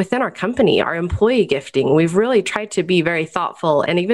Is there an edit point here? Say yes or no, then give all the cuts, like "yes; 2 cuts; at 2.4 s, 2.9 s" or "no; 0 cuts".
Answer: no; 0 cuts